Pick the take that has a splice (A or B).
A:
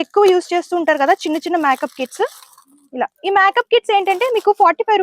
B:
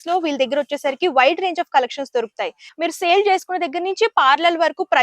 B